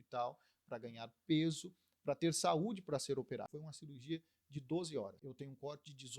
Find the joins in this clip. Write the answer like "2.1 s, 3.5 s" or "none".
3.6 s, 5.3 s